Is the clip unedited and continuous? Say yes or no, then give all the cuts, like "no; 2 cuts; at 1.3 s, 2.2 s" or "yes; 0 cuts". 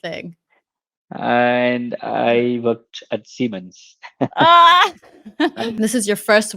no; 1 cut; at 5.6 s